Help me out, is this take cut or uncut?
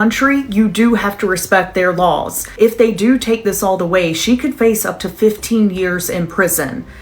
cut